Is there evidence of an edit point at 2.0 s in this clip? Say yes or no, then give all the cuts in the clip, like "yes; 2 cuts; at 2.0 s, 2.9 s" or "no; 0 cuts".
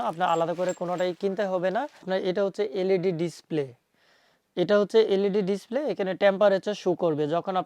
yes; 1 cut; at 2.0 s